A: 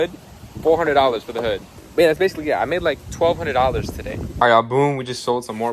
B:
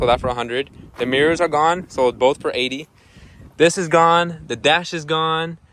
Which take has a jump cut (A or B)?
A